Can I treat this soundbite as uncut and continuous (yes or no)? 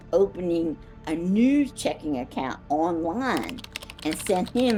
yes